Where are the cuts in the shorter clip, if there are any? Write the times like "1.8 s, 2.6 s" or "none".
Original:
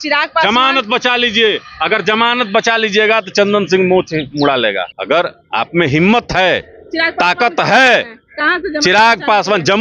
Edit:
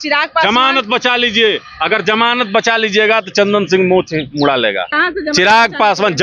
4.9 s

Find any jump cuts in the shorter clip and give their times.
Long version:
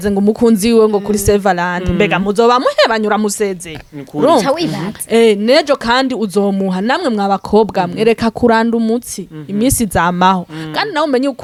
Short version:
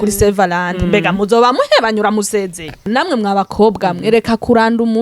2.8 s

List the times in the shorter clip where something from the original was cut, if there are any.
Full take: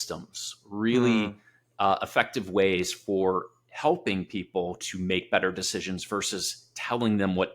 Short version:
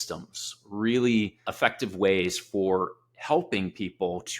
1.5 s

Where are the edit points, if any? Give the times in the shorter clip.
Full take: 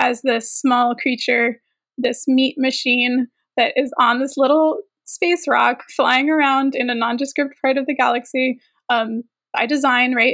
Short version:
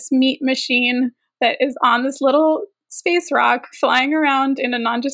none

